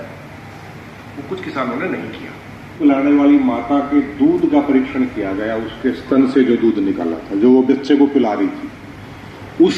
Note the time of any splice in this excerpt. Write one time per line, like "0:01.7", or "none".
0:02.8